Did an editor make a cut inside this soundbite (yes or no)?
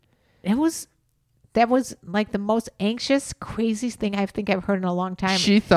no